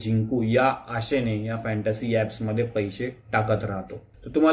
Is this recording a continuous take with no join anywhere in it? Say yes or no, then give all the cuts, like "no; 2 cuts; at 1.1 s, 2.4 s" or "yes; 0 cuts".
yes; 0 cuts